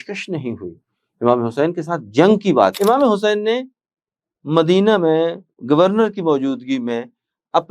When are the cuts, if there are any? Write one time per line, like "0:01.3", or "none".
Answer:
0:02.8